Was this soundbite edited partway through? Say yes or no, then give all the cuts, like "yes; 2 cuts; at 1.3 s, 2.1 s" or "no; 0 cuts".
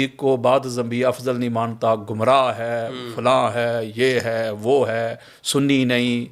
no; 0 cuts